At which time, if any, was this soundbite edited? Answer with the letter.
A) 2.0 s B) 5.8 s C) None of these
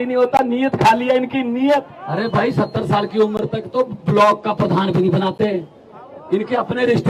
A